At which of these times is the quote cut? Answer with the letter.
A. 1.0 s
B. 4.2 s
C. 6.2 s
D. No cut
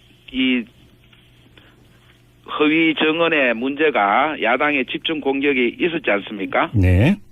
A